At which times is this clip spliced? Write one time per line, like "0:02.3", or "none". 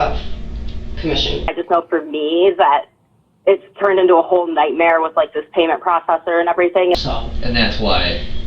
0:01.5
0:06.9

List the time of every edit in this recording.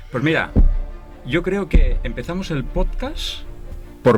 none

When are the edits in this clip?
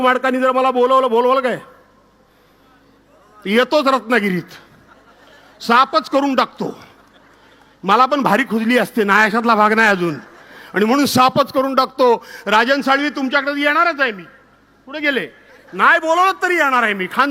none

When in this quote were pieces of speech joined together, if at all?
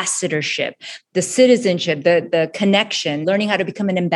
0:03.2

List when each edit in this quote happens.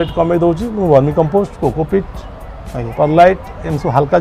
none

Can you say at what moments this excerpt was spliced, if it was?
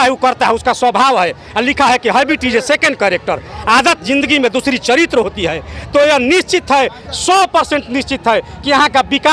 none

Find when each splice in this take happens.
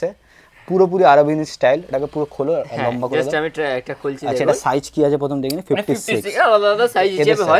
none

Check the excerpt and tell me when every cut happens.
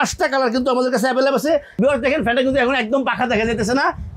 0:01.7

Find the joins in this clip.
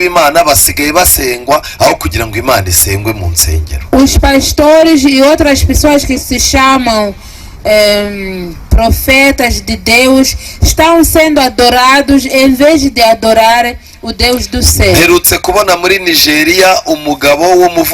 none

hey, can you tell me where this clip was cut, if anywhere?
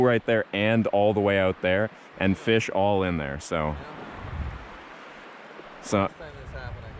none

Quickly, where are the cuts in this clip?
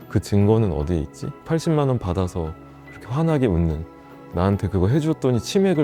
none

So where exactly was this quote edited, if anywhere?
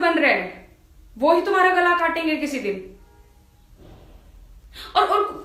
none

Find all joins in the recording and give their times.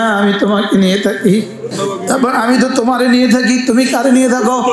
0:01.6

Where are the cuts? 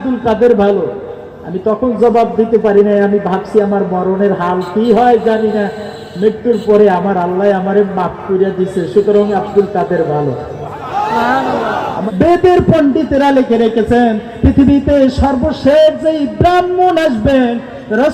0:12.0

